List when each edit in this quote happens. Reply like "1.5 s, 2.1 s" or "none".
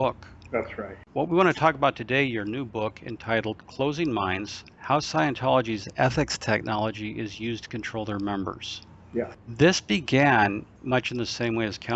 6.3 s